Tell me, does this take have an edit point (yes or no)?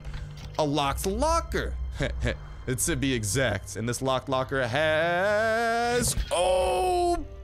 no